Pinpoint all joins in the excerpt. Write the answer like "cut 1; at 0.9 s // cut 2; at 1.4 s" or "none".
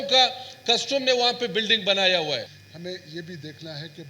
cut 1; at 2.5 s